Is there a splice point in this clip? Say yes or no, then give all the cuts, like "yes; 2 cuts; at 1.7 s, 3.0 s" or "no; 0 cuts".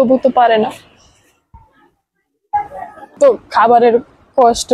yes; 1 cut; at 3.1 s